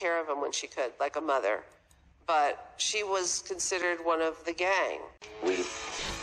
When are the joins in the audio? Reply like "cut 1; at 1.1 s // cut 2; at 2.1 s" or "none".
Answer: cut 1; at 5.2 s